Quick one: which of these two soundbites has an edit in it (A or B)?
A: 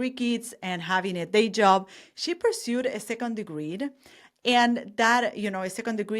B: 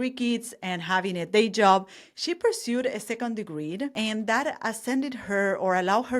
B